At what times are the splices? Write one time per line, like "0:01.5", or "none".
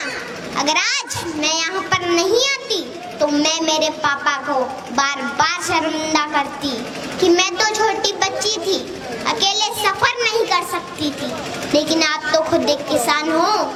none